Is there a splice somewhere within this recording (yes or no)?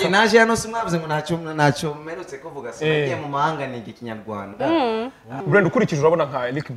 yes